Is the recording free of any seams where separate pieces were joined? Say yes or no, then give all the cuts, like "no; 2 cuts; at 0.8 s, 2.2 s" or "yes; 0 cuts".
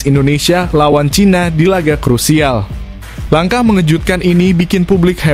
yes; 0 cuts